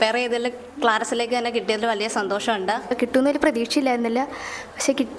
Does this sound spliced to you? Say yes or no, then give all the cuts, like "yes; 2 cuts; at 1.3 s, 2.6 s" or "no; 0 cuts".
yes; 1 cut; at 2.9 s